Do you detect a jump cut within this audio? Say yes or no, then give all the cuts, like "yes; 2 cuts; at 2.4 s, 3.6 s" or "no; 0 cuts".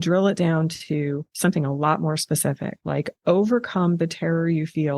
yes; 2 cuts; at 1.3 s, 2.7 s